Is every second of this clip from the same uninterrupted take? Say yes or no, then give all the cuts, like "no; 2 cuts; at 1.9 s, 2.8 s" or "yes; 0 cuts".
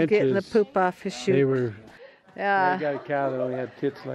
no; 1 cut; at 1.8 s